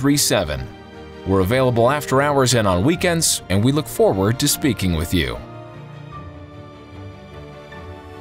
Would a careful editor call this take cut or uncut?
cut